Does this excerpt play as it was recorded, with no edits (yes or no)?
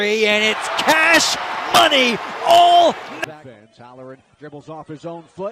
yes